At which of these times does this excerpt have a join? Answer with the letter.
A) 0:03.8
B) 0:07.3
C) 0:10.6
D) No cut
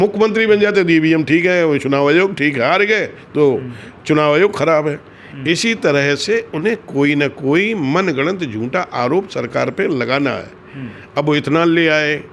D